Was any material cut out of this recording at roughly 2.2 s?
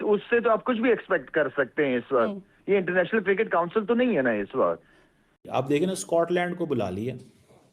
no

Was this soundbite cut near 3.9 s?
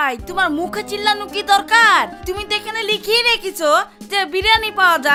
no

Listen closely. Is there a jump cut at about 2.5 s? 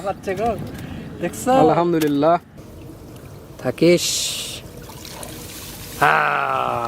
yes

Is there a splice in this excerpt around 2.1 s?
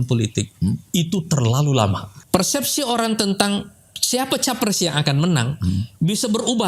yes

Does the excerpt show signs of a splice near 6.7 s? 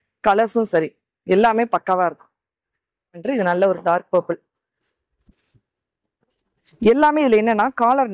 no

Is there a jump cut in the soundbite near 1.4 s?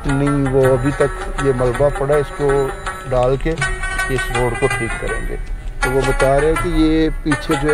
no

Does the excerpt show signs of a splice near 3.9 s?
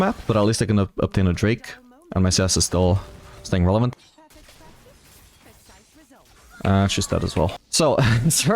yes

